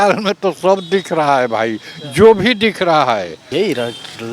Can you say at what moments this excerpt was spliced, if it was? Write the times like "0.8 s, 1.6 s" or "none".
3.4 s